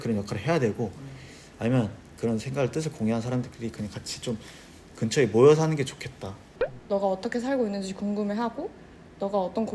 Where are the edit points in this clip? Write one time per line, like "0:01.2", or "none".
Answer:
0:06.5